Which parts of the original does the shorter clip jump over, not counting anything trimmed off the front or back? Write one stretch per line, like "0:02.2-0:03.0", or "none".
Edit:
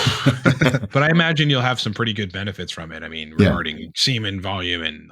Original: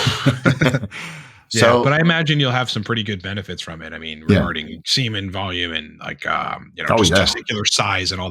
0:00.9-0:01.8